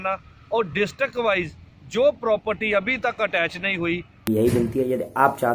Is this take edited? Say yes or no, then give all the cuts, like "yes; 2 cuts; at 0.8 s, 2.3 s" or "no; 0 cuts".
yes; 1 cut; at 4.3 s